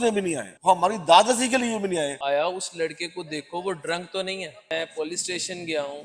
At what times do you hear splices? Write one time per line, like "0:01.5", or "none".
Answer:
0:02.2
0:04.5